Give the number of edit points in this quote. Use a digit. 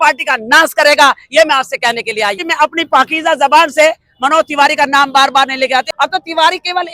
2